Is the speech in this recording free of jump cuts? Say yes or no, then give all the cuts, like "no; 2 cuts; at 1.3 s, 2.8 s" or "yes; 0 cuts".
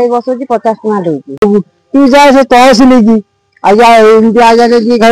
no; 1 cut; at 1.4 s